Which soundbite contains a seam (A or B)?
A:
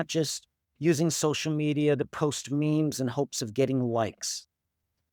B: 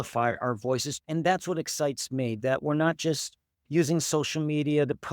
B